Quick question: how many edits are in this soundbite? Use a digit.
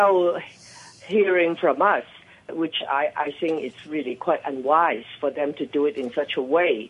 1